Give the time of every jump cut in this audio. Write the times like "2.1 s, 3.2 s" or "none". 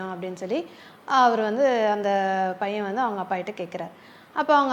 none